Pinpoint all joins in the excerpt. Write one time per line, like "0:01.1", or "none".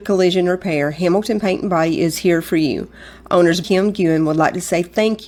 none